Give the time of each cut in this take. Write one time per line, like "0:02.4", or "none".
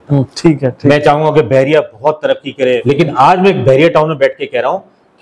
0:02.8